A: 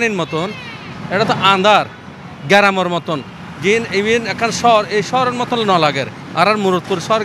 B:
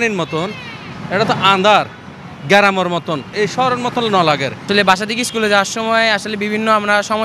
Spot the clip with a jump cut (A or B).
B